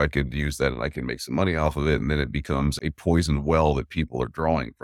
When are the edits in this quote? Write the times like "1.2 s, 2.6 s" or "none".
2.7 s